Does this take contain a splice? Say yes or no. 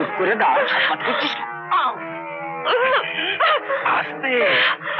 no